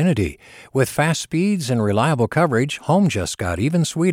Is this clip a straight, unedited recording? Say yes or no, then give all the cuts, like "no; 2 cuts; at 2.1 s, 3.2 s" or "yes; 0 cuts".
yes; 0 cuts